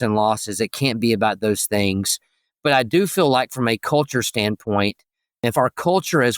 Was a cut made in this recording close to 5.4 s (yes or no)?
yes